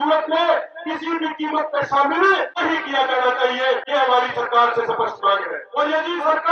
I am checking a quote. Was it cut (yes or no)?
yes